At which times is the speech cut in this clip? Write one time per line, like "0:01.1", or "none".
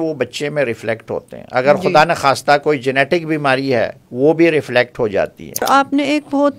0:04.0
0:05.6

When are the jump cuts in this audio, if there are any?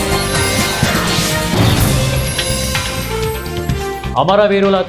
0:00.9

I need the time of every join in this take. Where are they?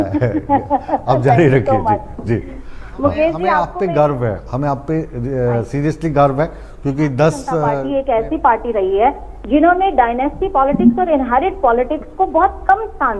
0:03.7
0:07.8

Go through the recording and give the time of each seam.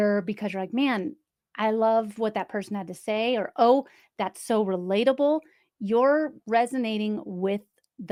none

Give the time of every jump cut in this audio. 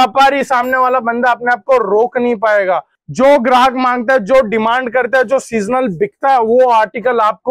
0:02.9

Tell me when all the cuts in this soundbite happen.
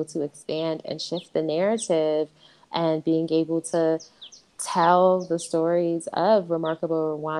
none

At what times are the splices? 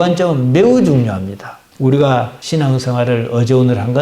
0:01.7

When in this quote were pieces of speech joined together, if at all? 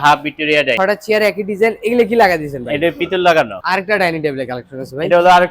0:00.8
0:03.6

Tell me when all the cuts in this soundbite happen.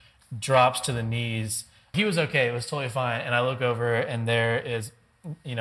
0:01.9

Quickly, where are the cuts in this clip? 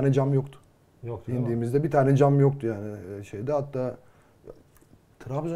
none

